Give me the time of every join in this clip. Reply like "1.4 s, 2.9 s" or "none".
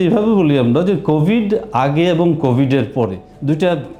none